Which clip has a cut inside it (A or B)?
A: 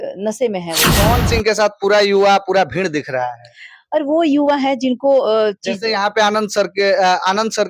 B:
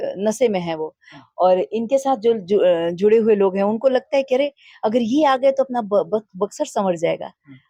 A